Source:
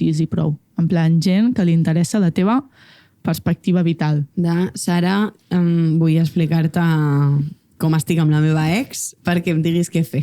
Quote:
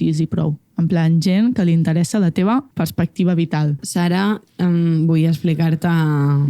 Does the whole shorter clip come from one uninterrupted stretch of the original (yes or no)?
no